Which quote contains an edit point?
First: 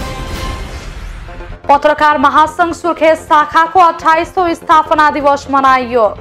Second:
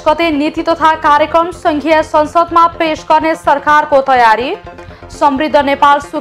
first; 1 cut; at 1.2 s

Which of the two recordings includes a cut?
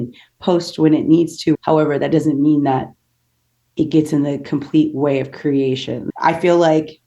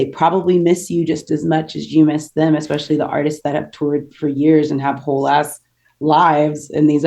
first; 2 cuts; at 1.6 s, 6.0 s

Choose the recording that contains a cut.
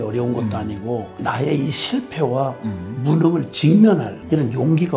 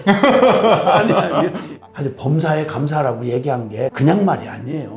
second; 2 cuts; at 1.8 s, 3.9 s

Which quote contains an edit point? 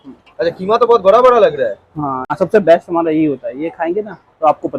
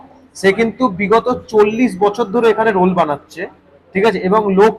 first; 1 cut; at 2.2 s

